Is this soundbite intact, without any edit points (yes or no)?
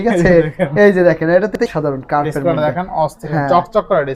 no